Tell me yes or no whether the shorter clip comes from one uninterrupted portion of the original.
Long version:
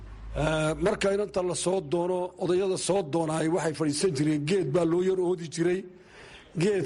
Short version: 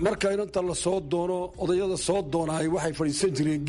yes